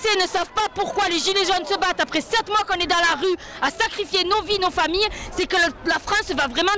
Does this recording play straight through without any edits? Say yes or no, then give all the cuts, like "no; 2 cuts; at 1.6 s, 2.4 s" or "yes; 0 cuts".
yes; 0 cuts